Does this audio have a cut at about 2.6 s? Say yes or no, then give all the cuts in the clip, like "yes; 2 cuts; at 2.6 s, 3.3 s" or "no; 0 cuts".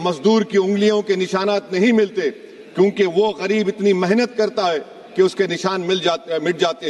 no; 0 cuts